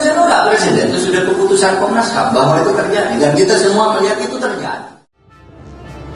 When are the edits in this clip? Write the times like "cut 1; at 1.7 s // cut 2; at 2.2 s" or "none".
cut 1; at 4.8 s